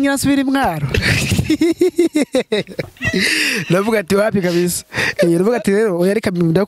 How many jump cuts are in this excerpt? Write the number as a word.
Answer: zero